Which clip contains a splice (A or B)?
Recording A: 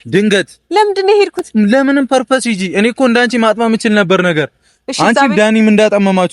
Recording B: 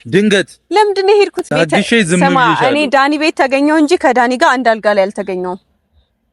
B